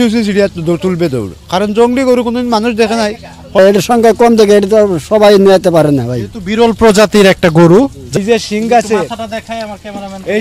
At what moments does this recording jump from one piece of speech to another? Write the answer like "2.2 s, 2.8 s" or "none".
3.6 s, 8.0 s